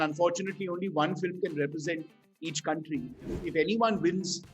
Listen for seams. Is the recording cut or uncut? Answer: cut